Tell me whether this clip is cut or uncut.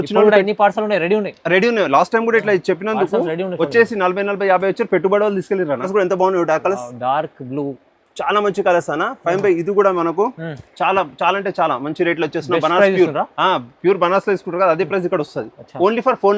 cut